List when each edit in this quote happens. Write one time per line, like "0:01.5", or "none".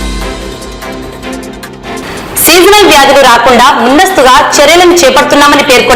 0:02.0

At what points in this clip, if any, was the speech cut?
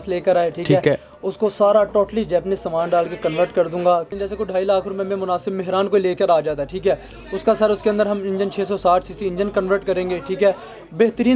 0:04.1

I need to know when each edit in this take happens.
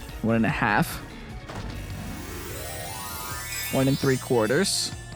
none

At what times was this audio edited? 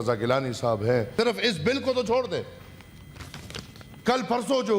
0:01.1

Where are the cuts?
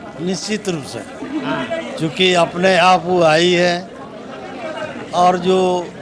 none

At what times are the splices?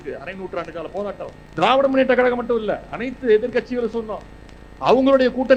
none

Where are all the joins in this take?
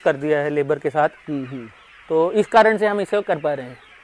none

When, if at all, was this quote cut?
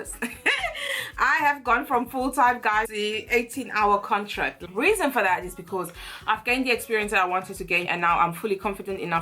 0:02.8
0:04.6
0:07.9

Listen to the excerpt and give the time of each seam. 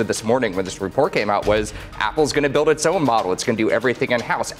none

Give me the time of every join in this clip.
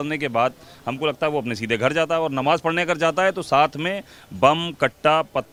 none

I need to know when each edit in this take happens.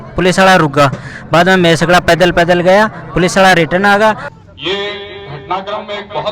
0:04.3

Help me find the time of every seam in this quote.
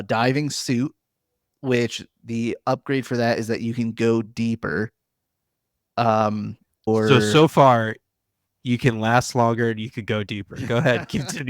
0:06.9

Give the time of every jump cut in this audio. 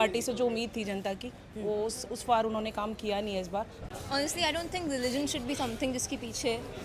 0:03.8

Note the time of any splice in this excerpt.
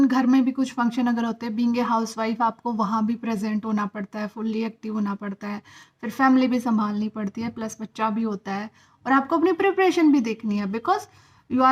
none

